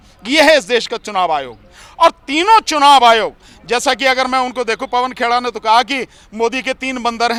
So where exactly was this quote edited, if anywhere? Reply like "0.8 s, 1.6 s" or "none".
none